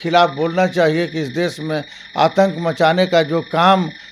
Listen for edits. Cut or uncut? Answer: uncut